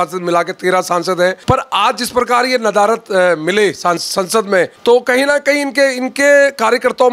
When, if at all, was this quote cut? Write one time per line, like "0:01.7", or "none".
0:01.4
0:04.7